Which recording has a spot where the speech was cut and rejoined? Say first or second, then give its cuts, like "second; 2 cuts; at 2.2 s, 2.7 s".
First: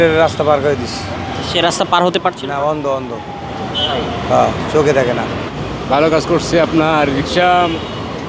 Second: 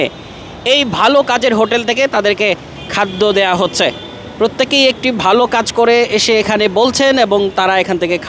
first; 2 cuts; at 1.4 s, 5.5 s